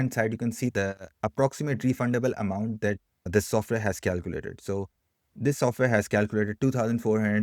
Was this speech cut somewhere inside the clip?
yes; 1 cut; at 1.0 s

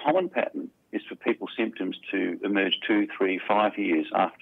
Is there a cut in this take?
no; 0 cuts

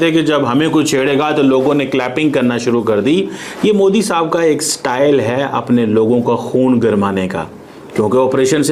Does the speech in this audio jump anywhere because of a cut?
no; 0 cuts

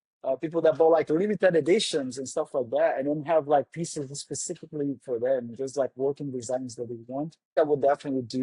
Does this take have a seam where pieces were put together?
yes; 1 cut; at 7.5 s

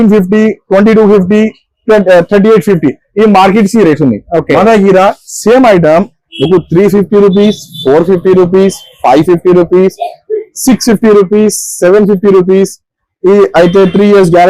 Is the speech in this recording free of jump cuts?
yes; 0 cuts

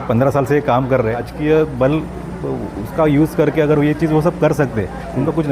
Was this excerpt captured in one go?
no; 1 cut; at 1.3 s

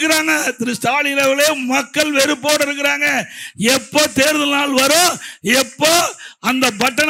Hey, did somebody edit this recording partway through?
no; 0 cuts

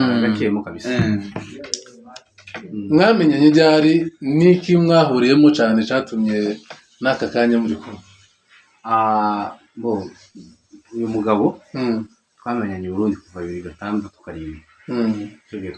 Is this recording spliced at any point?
no; 0 cuts

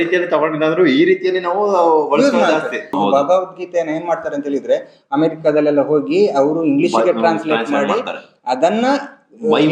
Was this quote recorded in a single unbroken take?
no; 1 cut; at 2.9 s

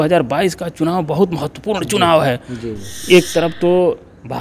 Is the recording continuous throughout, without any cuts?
yes; 0 cuts

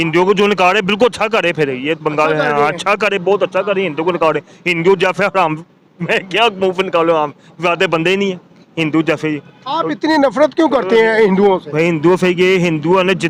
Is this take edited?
no; 0 cuts

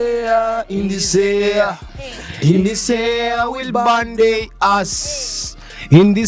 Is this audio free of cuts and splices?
yes; 0 cuts

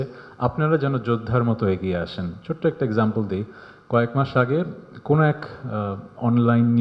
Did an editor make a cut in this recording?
no; 0 cuts

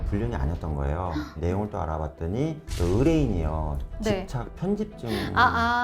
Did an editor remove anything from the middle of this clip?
yes; 1 cut; at 1.3 s

